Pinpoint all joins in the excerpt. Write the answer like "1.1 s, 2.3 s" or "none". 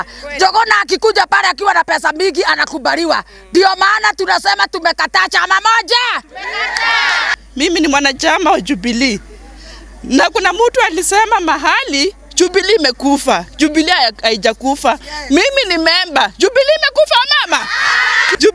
7.3 s